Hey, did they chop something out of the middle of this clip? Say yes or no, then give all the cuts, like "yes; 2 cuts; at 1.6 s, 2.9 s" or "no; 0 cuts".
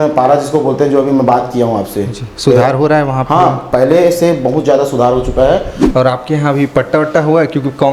yes; 1 cut; at 5.8 s